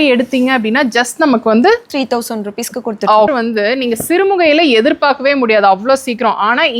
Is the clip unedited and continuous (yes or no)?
no